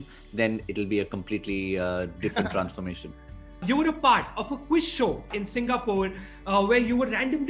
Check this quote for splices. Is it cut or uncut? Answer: cut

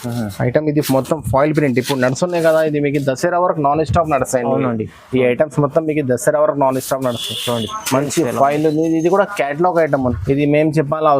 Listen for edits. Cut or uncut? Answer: cut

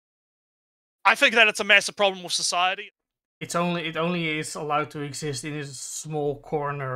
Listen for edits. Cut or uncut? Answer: cut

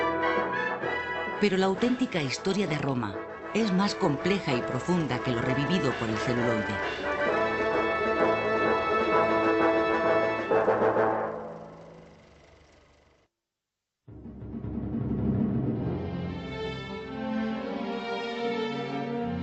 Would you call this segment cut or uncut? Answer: uncut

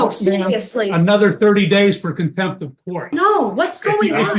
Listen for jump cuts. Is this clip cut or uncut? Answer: cut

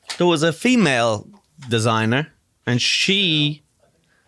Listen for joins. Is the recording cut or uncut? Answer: uncut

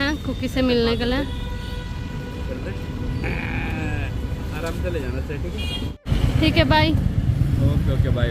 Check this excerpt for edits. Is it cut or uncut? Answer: uncut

